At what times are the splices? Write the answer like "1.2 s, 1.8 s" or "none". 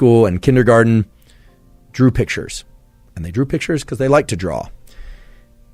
none